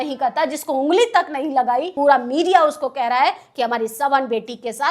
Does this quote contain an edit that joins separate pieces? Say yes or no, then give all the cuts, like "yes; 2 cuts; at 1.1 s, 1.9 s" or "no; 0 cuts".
yes; 1 cut; at 1.9 s